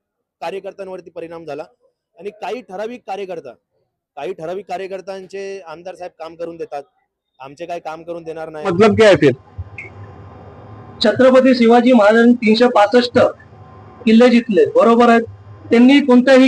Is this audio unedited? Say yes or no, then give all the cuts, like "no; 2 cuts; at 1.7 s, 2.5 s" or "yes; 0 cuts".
no; 1 cut; at 8.7 s